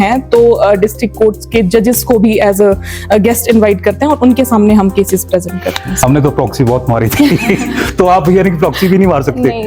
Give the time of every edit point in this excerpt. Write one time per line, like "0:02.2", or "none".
0:06.0